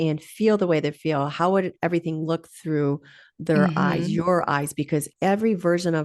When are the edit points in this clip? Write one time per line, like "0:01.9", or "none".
0:05.1